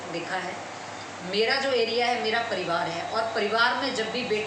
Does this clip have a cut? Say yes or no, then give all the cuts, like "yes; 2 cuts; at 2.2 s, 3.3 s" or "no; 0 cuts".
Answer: no; 0 cuts